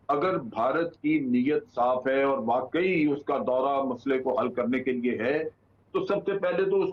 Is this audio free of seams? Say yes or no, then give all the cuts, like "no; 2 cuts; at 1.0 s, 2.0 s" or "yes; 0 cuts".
yes; 0 cuts